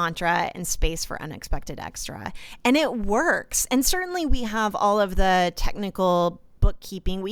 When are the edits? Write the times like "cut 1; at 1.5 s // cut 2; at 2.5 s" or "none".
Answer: none

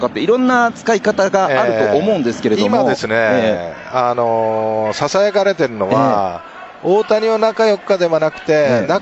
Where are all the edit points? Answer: none

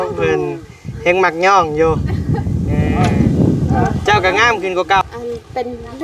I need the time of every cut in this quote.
cut 1; at 5.0 s

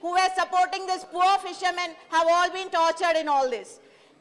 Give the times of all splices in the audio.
cut 1; at 1.5 s // cut 2; at 3.1 s

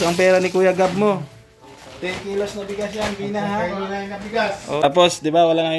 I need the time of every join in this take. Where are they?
cut 1; at 4.8 s

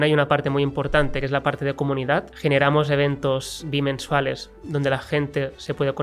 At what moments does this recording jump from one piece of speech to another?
cut 1; at 1.2 s // cut 2; at 2.3 s // cut 3; at 3.6 s

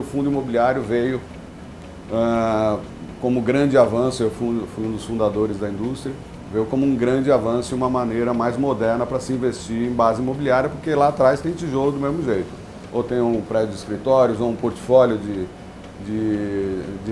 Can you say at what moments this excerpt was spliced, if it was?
none

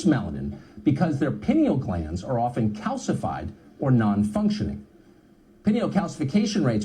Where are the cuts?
cut 1; at 4.8 s

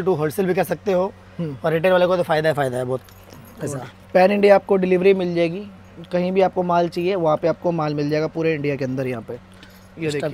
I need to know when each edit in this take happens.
none

